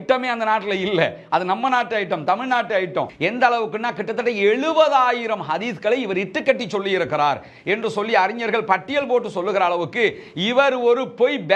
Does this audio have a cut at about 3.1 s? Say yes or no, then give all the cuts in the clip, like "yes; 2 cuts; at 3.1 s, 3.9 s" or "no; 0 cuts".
yes; 1 cut; at 3.1 s